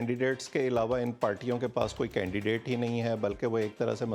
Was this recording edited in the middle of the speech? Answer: no; 0 cuts

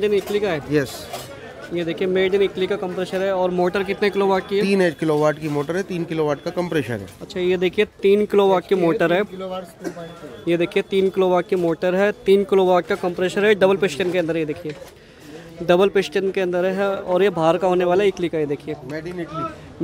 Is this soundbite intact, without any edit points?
yes; 0 cuts

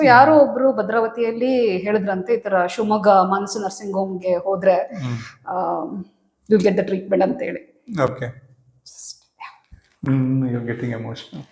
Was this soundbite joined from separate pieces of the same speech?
no; 0 cuts

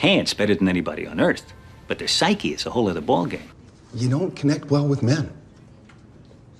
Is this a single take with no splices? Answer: no; 1 cut; at 3.4 s

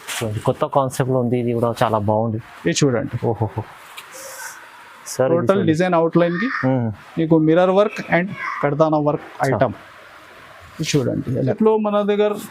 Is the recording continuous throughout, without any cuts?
no; 1 cut; at 11.6 s

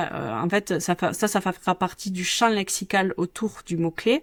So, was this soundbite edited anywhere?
no; 0 cuts

